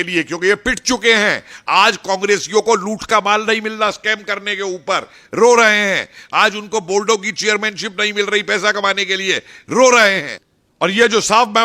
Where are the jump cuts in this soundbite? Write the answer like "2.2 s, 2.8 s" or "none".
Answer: 10.3 s